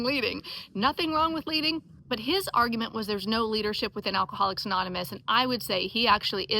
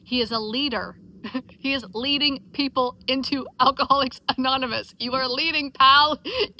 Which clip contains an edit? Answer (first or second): first